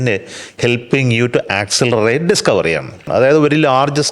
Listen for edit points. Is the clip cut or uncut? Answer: cut